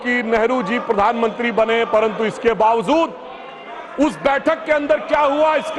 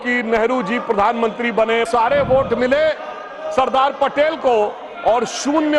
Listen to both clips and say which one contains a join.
second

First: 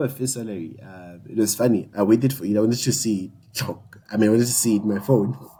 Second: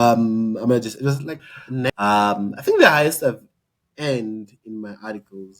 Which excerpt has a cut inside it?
second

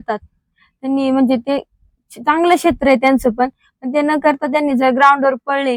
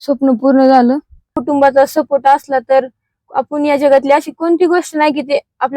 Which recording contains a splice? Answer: second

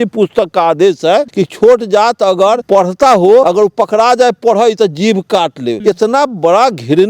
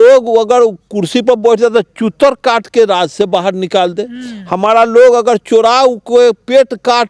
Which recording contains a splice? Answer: first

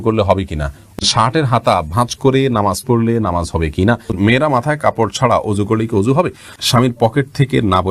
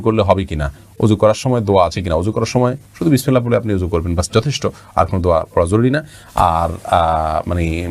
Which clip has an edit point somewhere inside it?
first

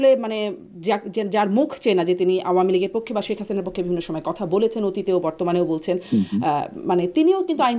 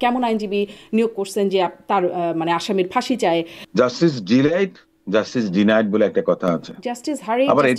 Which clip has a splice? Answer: second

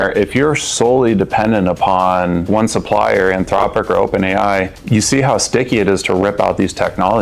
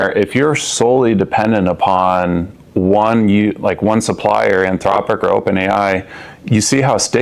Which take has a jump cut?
first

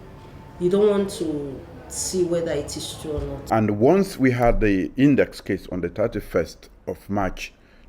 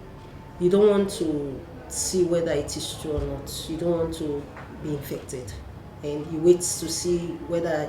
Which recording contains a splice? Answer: first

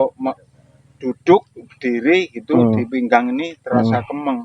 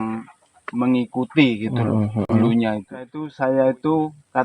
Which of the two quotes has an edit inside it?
second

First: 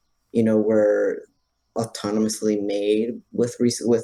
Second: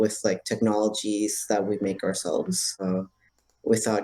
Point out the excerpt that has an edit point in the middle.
second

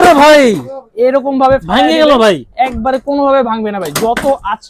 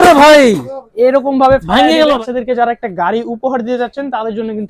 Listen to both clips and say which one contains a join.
second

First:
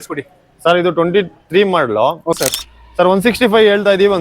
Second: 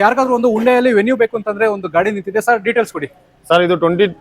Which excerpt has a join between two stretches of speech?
first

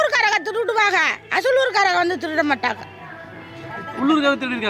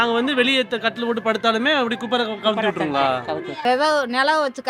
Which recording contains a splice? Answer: second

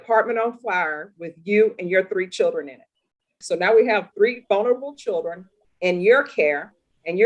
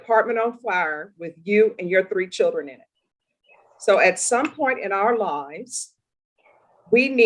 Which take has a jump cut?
first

